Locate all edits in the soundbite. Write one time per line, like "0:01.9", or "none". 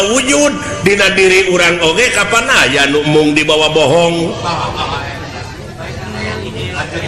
none